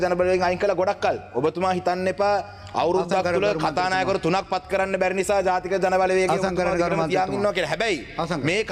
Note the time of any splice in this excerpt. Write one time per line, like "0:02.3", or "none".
none

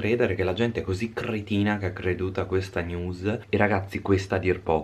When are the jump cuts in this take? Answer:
0:03.4

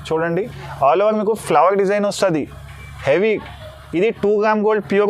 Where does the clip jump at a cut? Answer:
none

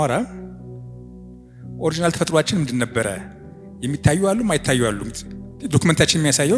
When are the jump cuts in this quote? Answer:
none

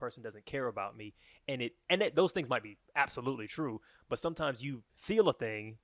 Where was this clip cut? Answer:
none

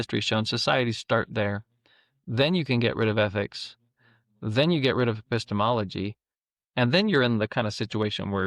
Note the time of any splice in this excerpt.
none

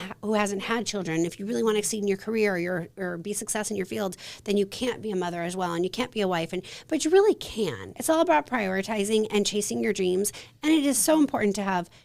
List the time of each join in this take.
0:07.9

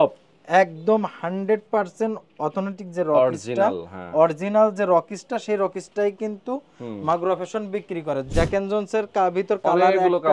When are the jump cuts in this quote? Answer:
0:08.3

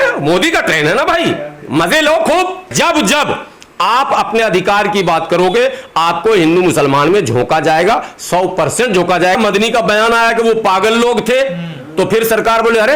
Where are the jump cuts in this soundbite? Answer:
0:02.7
0:09.4

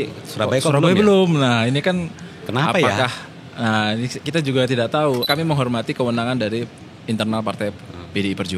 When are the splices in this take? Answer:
0:05.3

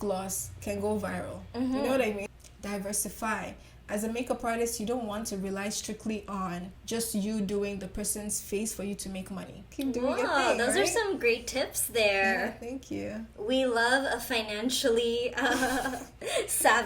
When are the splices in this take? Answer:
0:02.3
0:06.7
0:09.6

